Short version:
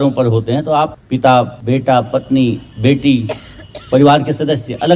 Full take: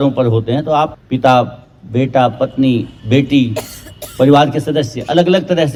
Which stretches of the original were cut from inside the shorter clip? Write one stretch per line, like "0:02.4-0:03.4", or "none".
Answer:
0:01.6-0:01.8